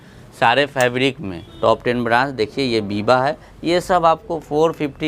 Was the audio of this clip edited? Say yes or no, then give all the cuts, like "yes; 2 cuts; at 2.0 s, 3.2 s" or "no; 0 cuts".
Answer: yes; 1 cut; at 1.4 s